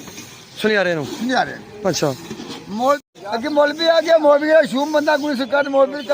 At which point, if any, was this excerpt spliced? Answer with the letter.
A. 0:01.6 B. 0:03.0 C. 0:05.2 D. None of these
B